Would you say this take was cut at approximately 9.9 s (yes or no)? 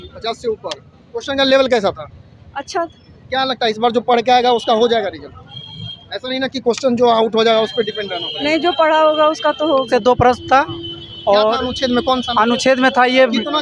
yes